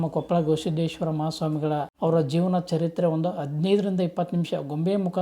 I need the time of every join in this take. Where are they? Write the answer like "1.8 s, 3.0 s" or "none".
1.9 s